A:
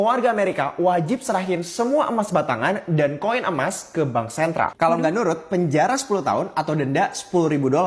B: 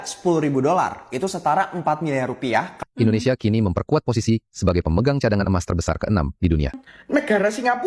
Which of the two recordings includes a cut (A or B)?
B